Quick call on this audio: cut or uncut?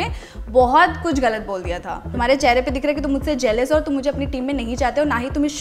cut